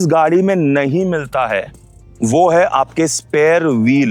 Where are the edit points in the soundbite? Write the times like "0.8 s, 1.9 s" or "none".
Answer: none